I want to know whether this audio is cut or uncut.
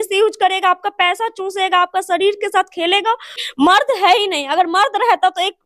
cut